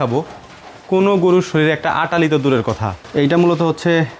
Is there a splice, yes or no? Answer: yes